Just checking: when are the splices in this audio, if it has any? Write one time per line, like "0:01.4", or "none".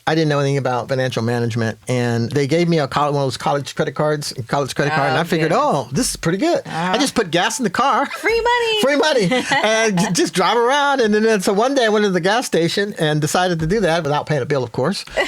0:00.8
0:02.3
0:03.7
0:12.9
0:14.0